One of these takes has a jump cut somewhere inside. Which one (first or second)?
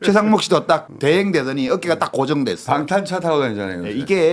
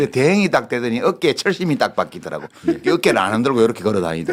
first